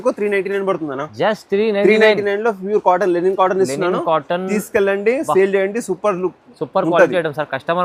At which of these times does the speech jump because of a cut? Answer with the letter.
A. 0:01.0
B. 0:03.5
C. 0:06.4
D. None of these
D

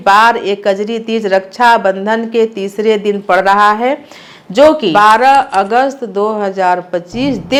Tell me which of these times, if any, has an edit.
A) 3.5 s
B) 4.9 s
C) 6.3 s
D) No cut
D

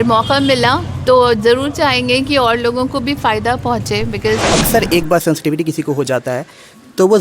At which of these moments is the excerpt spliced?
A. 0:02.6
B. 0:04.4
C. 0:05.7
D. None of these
B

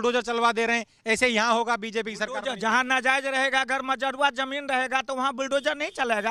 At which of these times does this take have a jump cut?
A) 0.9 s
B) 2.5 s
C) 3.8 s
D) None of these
D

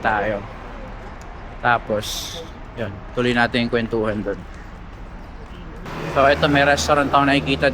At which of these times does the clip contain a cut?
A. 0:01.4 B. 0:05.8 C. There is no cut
B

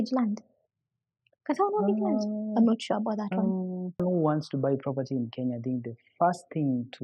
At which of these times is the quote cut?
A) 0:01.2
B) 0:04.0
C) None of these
B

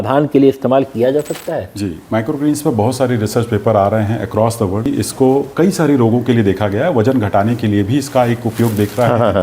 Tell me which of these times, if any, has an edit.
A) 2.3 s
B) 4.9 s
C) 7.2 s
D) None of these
B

